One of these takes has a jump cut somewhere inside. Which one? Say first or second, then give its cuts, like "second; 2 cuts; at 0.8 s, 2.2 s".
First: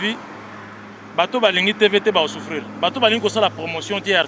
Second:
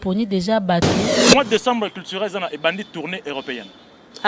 second; 1 cut; at 1.2 s